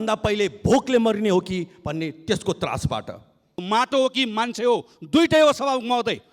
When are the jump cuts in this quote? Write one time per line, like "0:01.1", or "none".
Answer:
0:03.6

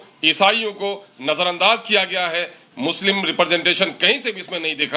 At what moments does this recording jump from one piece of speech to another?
none

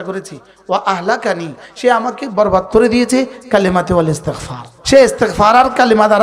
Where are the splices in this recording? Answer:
0:04.8

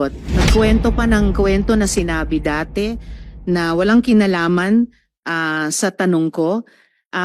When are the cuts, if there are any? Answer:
none

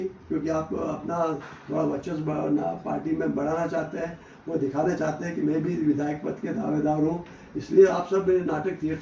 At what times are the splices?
none

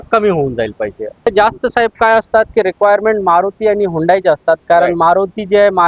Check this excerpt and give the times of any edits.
0:01.3

